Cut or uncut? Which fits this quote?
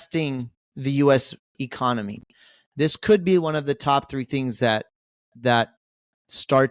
uncut